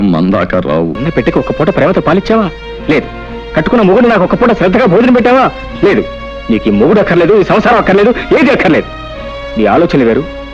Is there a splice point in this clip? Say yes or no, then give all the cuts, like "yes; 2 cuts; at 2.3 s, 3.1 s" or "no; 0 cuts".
yes; 1 cut; at 1.0 s